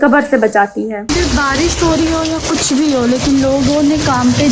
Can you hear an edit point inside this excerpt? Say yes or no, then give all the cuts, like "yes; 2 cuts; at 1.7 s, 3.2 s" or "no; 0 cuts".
yes; 1 cut; at 1.0 s